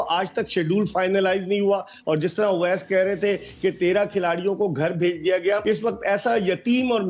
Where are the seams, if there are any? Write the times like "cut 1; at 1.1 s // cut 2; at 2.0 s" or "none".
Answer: cut 1; at 5.6 s